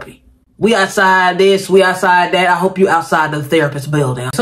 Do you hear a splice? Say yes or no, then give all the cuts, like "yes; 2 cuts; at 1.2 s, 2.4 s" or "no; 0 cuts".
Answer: no; 0 cuts